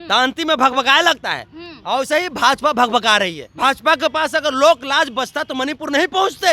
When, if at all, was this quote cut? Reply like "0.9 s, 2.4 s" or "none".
3.4 s

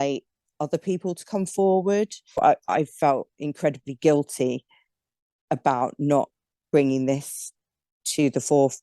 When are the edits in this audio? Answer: 2.4 s

